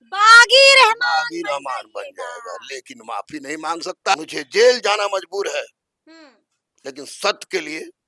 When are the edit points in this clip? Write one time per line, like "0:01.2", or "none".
0:04.1